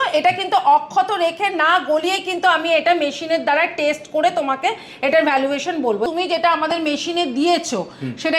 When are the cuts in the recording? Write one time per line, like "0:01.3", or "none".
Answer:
0:06.1